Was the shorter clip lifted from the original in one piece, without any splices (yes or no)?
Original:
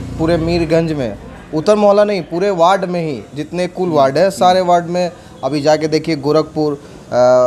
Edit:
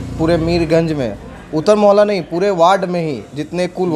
yes